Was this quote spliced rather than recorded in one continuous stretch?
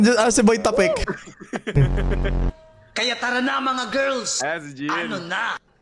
yes; 1 cut; at 1.0 s

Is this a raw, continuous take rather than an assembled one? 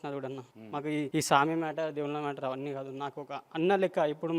no; 1 cut; at 0.9 s

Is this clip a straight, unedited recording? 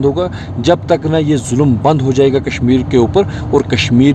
yes; 0 cuts

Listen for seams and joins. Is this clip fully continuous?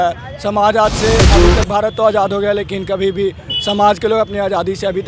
yes; 0 cuts

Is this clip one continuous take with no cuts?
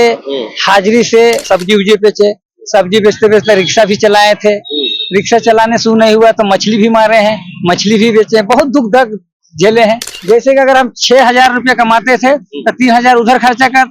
no; 2 cuts; at 1.5 s, 10.1 s

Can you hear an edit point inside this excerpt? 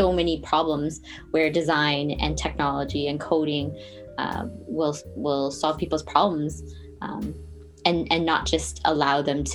no; 0 cuts

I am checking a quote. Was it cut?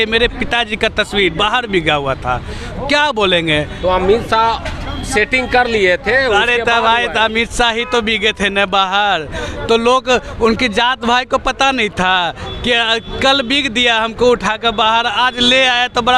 no; 0 cuts

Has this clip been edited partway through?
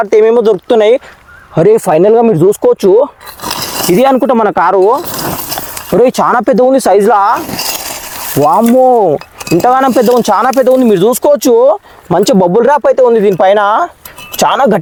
no; 0 cuts

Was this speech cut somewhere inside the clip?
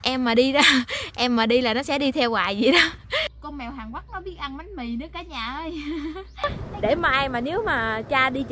yes; 2 cuts; at 3.4 s, 6.5 s

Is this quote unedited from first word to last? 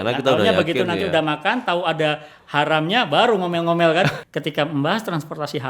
no; 1 cut; at 4.2 s

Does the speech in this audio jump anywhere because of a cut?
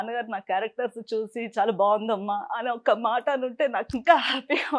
no; 0 cuts

